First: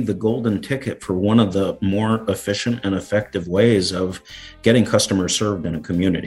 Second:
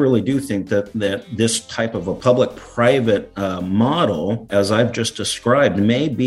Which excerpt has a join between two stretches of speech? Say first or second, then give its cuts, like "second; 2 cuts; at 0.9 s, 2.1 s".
second; 1 cut; at 4.4 s